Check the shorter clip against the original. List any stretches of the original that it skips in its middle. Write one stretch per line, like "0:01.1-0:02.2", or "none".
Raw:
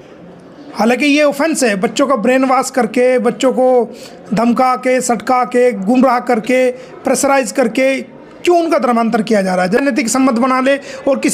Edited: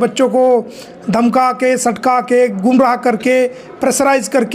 none